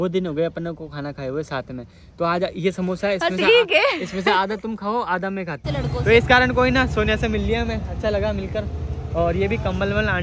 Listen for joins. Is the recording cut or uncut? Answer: cut